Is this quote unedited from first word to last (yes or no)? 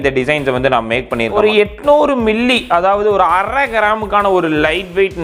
no